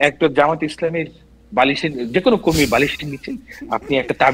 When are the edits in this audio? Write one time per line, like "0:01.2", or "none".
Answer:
none